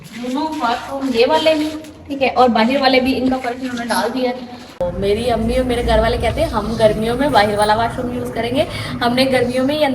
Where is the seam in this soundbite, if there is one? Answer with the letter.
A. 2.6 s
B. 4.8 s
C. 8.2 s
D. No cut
B